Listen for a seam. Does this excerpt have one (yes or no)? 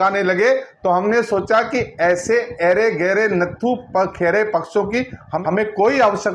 yes